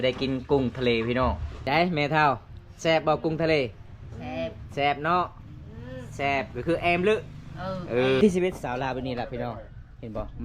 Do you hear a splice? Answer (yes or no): yes